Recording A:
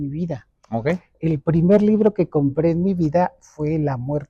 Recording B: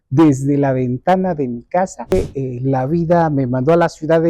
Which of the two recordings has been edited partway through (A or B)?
B